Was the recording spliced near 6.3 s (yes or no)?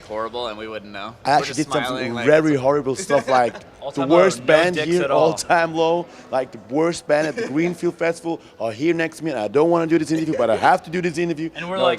yes